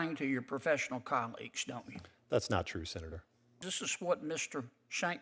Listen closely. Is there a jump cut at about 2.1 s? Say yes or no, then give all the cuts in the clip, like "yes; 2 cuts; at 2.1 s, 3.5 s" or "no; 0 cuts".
no; 1 cut; at 3.6 s